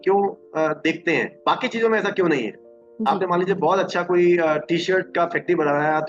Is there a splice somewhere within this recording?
yes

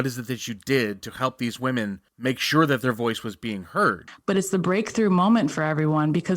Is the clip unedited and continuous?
no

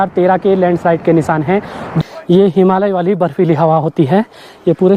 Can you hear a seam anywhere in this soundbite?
yes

